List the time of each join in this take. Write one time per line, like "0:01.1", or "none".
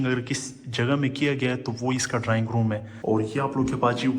0:02.9